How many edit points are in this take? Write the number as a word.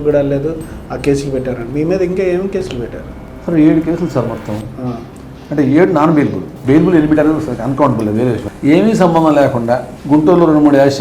two